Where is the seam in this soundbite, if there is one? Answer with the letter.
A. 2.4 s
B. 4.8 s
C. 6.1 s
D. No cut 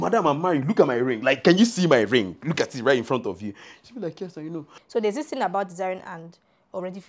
B